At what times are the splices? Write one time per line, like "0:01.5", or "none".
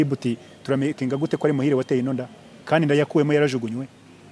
none